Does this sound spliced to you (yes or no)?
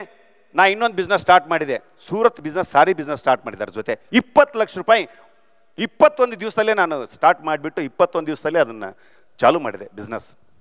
no